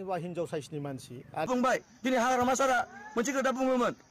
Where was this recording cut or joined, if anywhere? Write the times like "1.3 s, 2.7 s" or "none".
1.5 s